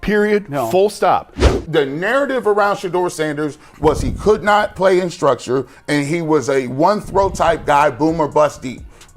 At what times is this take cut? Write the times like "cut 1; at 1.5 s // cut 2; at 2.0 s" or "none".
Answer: cut 1; at 1.5 s